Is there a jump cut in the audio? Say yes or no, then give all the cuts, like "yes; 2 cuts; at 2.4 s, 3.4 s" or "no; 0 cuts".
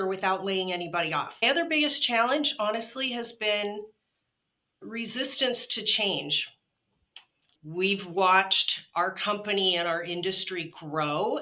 yes; 2 cuts; at 1.4 s, 7.6 s